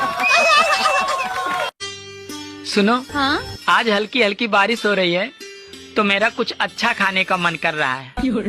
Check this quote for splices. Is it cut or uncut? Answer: uncut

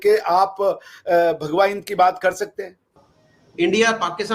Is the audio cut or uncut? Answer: cut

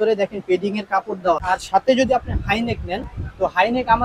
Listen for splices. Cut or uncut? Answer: cut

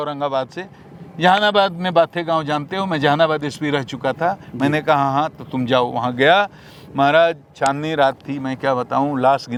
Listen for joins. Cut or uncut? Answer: uncut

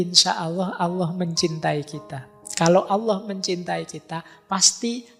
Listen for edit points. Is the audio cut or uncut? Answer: uncut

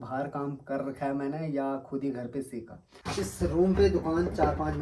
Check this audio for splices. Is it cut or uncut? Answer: cut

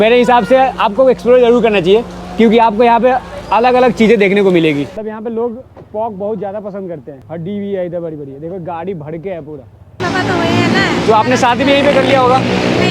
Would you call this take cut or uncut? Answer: cut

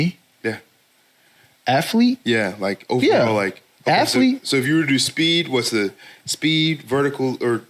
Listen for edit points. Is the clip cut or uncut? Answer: uncut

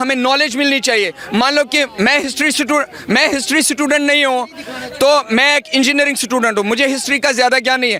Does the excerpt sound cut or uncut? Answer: uncut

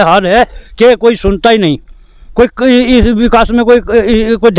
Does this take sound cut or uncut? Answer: uncut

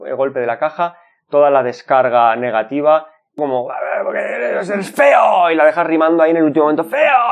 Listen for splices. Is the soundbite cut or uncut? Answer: cut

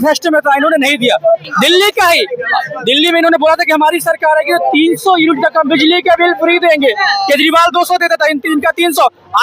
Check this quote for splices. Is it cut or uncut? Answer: uncut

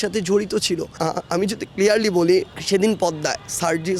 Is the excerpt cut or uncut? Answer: cut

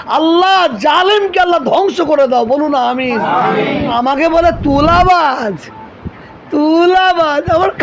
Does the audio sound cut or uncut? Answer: cut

